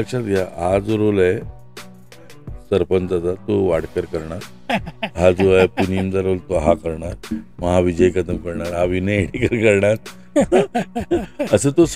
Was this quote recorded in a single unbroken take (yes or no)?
yes